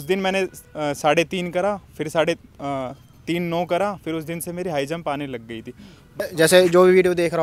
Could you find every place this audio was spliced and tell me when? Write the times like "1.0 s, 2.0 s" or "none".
6.2 s